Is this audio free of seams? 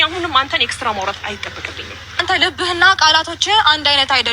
no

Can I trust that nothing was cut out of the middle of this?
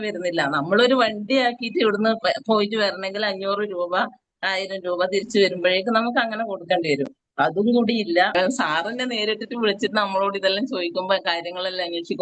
no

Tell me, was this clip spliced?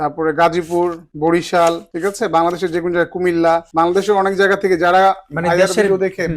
yes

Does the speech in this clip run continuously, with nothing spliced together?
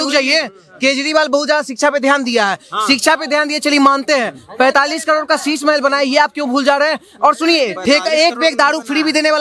yes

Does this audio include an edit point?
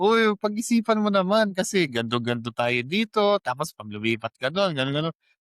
no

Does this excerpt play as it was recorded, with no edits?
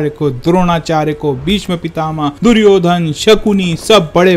no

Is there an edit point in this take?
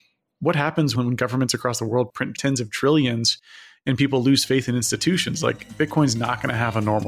yes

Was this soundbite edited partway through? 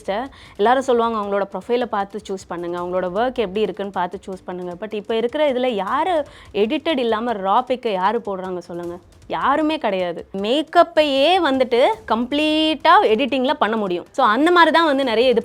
yes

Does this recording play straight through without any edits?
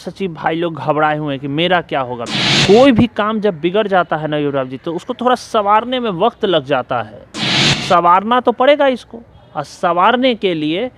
no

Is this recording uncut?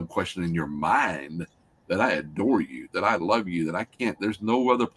yes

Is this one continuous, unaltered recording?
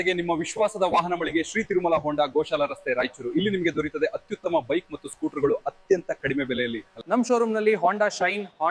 yes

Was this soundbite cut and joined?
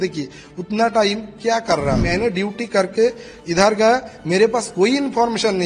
yes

